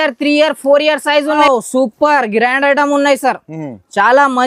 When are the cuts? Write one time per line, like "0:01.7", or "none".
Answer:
0:01.4